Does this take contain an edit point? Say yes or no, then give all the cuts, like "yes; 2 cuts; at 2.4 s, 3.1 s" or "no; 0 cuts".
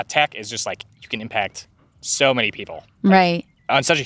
no; 0 cuts